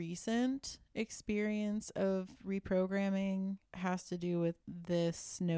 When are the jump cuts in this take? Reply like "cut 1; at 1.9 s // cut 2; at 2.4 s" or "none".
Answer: cut 1; at 3.7 s // cut 2; at 4.6 s